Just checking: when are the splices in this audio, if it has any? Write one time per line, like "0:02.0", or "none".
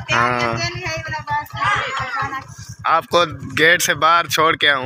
0:02.9

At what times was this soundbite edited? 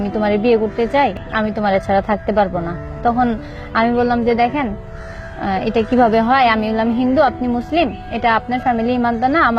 0:01.2

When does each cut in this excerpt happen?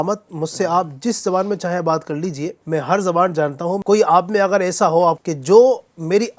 0:02.6
0:03.8
0:05.2

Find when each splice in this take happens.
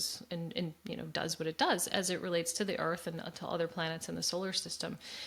none

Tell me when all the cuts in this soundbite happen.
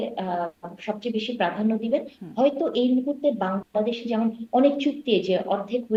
none

